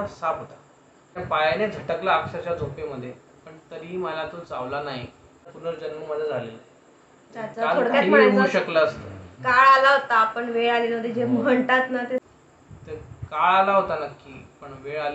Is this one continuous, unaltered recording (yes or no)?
no